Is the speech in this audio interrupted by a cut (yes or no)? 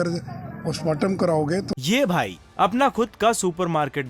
yes